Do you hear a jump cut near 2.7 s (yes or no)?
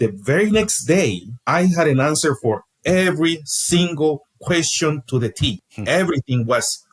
no